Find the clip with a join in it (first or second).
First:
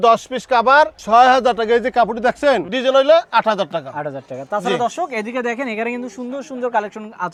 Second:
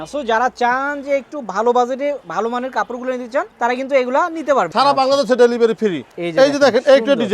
second